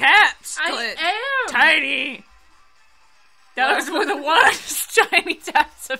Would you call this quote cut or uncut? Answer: uncut